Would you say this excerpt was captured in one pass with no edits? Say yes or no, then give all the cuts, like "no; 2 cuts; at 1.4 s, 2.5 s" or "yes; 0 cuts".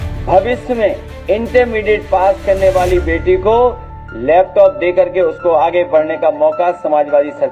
no; 1 cut; at 1.1 s